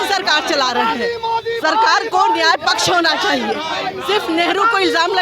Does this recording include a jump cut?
no; 0 cuts

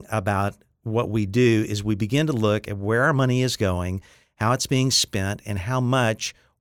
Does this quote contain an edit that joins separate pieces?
no; 0 cuts

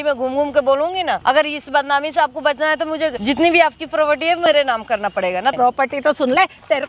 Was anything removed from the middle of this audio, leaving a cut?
yes; 3 cuts; at 1.2 s, 3.2 s, 5.5 s

